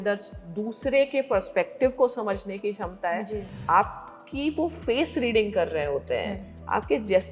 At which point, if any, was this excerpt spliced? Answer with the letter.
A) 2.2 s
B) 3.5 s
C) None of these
B